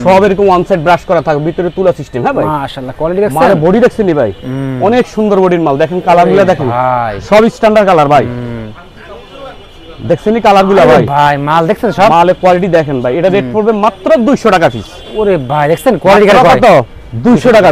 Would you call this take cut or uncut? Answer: uncut